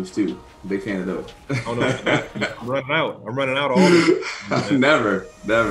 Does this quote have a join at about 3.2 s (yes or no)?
no